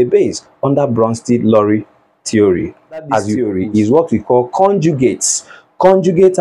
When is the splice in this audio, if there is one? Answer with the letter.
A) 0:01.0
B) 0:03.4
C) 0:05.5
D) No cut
B